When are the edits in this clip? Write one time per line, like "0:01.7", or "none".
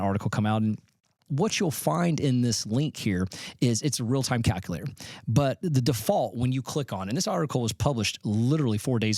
0:01.3